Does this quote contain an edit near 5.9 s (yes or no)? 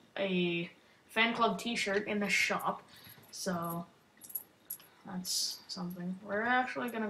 yes